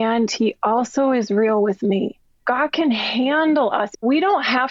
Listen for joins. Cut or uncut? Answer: cut